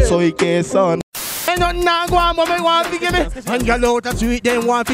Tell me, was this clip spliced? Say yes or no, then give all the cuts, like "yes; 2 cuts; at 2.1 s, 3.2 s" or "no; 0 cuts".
yes; 1 cut; at 1.0 s